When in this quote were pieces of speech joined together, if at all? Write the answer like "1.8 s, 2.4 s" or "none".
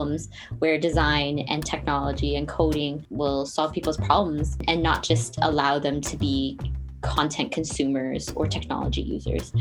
3.0 s, 4.6 s

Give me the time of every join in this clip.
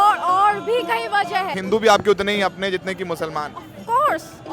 1.5 s

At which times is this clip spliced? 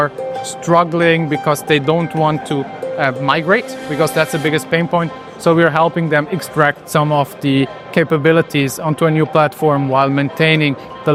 none

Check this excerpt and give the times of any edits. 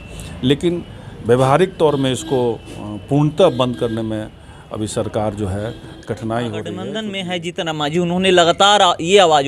6.9 s

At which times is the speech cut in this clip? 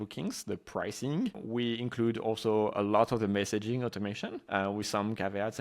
4.3 s

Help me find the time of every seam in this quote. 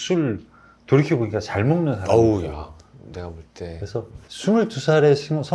4.2 s

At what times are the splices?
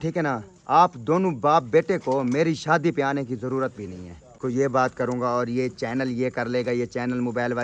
4.3 s

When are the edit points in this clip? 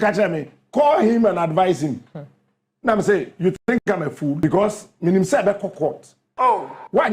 4.4 s

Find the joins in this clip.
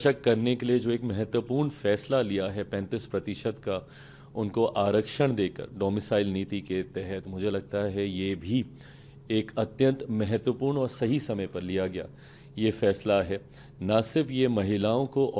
none

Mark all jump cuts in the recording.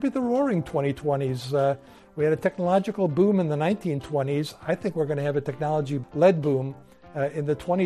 6.0 s

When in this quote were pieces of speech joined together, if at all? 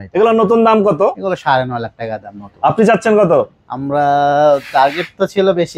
none

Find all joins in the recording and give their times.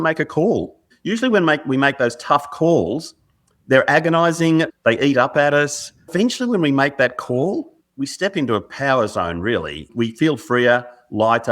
0.9 s, 4.7 s, 6.1 s, 7.8 s, 9.9 s

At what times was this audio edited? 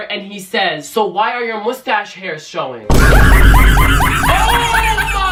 none

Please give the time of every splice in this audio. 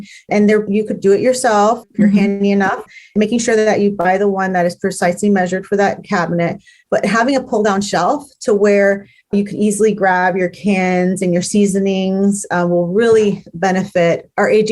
9.3 s

